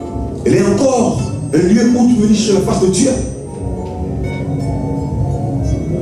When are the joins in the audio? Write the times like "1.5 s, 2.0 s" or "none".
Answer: none